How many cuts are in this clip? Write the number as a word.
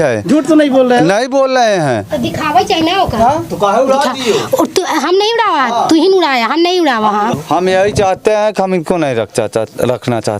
one